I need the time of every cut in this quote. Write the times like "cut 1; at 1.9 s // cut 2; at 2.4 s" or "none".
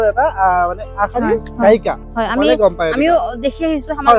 none